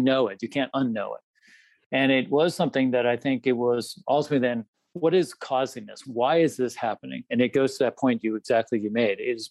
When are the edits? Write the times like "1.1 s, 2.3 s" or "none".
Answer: 4.7 s, 6.0 s